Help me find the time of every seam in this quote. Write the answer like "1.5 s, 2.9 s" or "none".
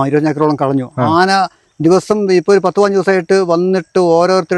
none